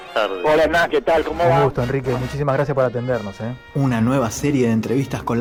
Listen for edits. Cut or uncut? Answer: uncut